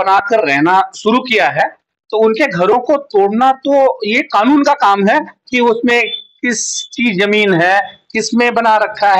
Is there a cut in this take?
no; 0 cuts

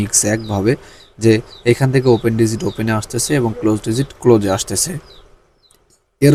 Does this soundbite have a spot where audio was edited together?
no; 0 cuts

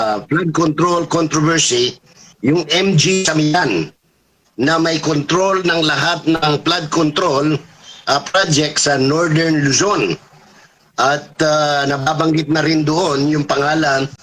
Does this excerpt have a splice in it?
no; 0 cuts

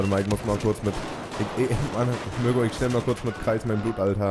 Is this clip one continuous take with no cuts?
yes; 0 cuts

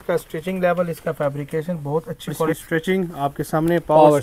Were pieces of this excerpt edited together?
yes; 1 cut; at 2.6 s

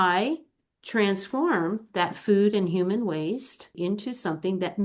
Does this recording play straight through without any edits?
no; 1 cut; at 3.8 s

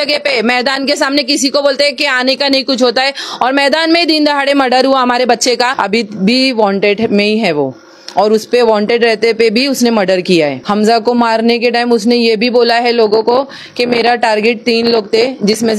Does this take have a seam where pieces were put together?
yes; 2 cuts; at 5.7 s, 10.6 s

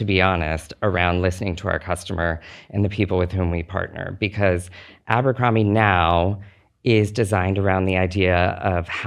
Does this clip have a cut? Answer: no; 0 cuts

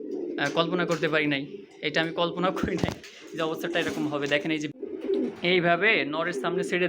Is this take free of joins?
no; 1 cut; at 4.7 s

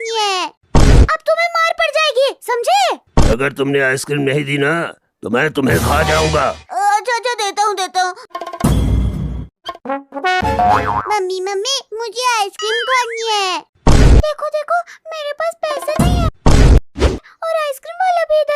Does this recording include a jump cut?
yes; 4 cuts; at 1.1 s, 3.3 s, 6.7 s, 9.7 s

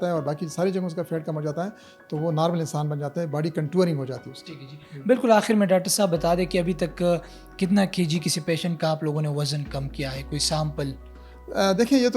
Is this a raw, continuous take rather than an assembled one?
yes; 0 cuts

